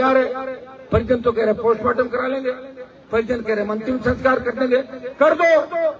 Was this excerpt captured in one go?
yes; 0 cuts

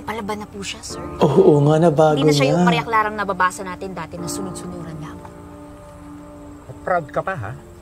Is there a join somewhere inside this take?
no; 0 cuts

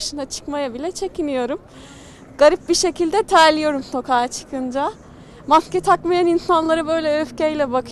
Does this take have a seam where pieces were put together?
no; 0 cuts

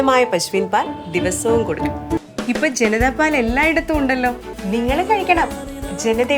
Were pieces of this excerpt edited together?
yes; 2 cuts; at 2.2 s, 4.5 s

